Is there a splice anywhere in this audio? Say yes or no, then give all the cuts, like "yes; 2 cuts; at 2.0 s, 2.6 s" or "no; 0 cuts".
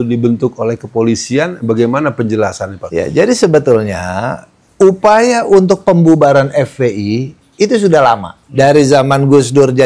yes; 2 cuts; at 2.7 s, 8.4 s